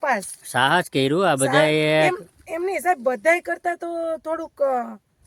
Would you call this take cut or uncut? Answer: uncut